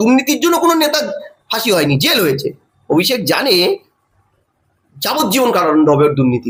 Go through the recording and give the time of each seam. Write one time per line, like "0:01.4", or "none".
none